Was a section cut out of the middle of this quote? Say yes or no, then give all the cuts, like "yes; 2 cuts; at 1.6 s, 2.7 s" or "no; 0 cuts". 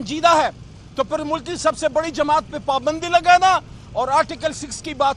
no; 0 cuts